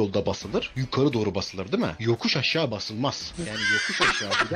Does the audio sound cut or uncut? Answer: uncut